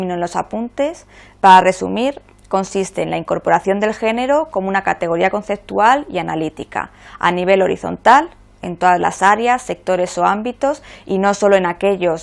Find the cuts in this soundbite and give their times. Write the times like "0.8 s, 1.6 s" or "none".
6.2 s